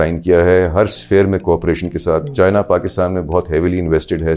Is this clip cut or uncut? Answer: uncut